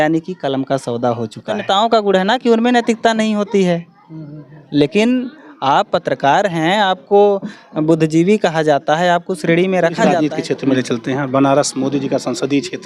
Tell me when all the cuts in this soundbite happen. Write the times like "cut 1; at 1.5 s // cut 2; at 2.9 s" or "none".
cut 1; at 1.6 s // cut 2; at 10.1 s

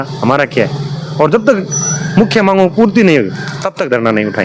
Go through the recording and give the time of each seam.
none

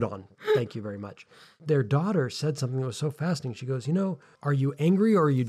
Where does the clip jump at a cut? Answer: cut 1; at 1.5 s // cut 2; at 4.3 s

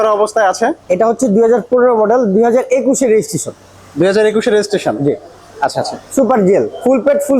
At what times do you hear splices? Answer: none

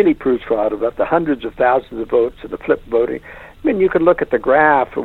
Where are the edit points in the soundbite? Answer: none

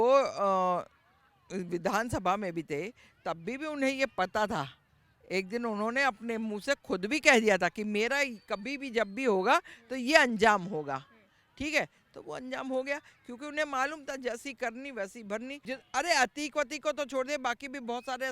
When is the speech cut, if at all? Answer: cut 1; at 15.6 s

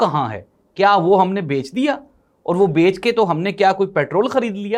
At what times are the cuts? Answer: none

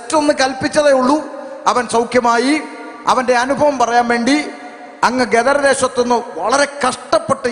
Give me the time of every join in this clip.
none

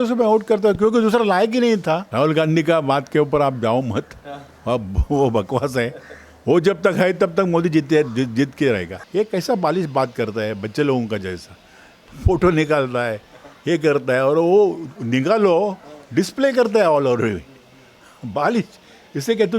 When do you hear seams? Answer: cut 1; at 2.1 s // cut 2; at 8.9 s

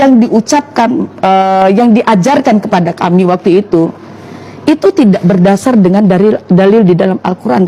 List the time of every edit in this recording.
none

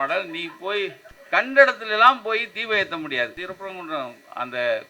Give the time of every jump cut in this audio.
cut 1; at 1.1 s // cut 2; at 3.4 s

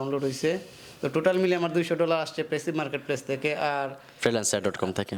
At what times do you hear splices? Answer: none

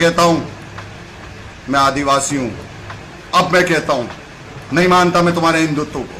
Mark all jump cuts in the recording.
none

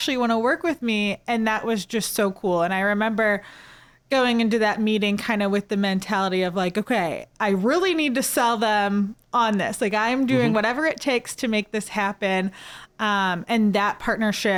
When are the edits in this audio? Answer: none

